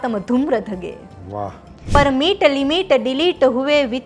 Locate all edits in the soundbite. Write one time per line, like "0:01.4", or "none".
0:01.9